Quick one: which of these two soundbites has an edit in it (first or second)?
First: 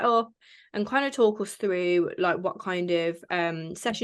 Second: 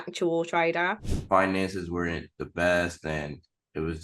second